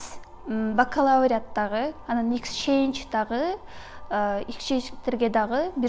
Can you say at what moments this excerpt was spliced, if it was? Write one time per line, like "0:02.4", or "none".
none